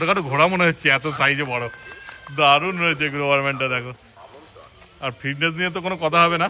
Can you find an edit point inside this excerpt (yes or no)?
no